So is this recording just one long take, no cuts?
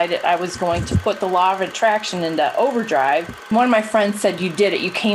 no; 1 cut; at 3.5 s

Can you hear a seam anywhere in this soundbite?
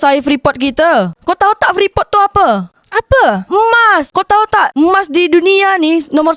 no; 0 cuts

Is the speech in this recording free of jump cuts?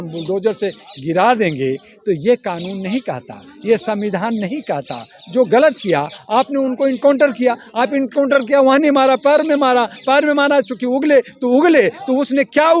yes; 0 cuts

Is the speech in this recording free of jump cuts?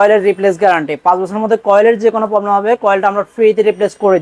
yes; 0 cuts

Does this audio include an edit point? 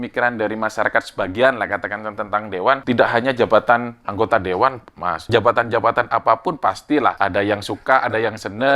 yes; 3 cuts; at 2.8 s, 5.3 s, 7.2 s

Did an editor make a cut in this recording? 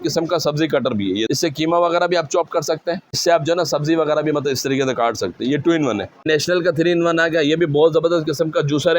yes; 3 cuts; at 1.3 s, 3.2 s, 6.3 s

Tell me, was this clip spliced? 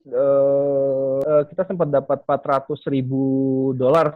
yes; 1 cut; at 1.2 s

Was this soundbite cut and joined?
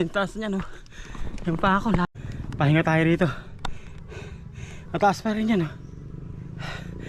yes; 1 cut; at 2.1 s

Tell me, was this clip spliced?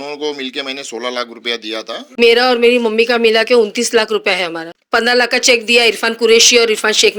yes; 2 cuts; at 2.2 s, 4.7 s

